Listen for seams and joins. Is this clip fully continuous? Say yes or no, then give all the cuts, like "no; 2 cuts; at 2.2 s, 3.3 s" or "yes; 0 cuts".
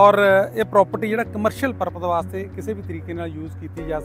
yes; 0 cuts